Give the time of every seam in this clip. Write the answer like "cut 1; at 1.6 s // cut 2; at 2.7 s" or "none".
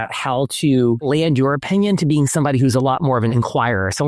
cut 1; at 1.0 s // cut 2; at 3.3 s